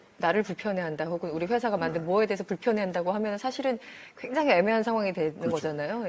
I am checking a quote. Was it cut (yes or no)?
no